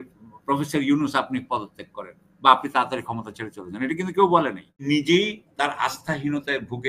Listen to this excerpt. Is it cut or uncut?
cut